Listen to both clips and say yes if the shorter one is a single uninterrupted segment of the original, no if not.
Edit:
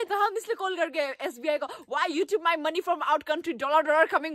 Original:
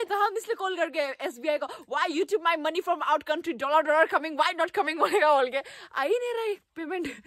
yes